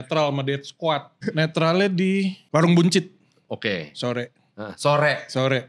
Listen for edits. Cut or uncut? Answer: uncut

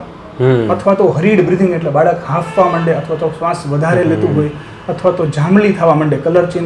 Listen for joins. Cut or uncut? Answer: uncut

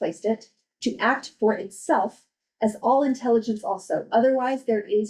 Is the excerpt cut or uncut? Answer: uncut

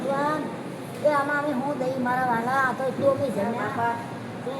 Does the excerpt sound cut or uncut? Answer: uncut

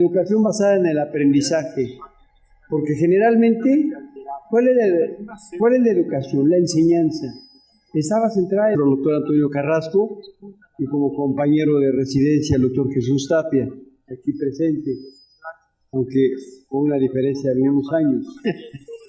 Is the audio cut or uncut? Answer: uncut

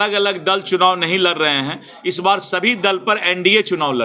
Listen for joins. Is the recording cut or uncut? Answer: uncut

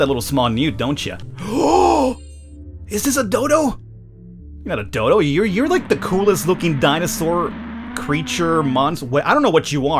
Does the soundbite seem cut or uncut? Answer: cut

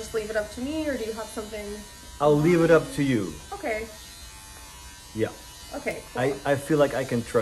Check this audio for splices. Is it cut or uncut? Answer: uncut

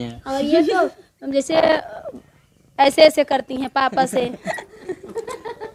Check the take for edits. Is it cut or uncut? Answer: uncut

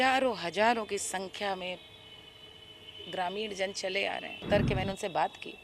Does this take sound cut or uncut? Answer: cut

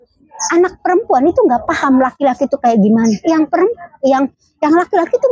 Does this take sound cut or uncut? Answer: uncut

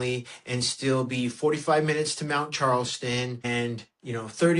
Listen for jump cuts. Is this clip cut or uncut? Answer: uncut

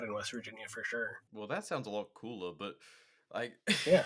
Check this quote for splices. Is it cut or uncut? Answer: cut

